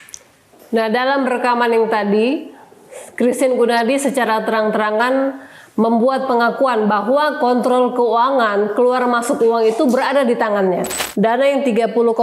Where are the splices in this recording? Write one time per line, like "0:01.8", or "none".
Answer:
0:11.0